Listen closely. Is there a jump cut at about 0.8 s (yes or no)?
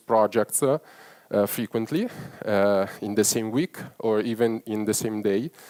no